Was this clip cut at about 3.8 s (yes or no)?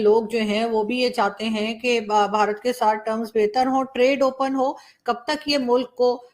no